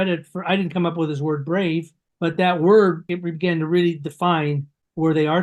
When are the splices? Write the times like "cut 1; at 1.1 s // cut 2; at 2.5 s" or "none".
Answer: cut 1; at 2.0 s // cut 2; at 3.1 s